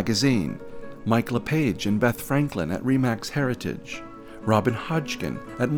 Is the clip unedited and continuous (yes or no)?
yes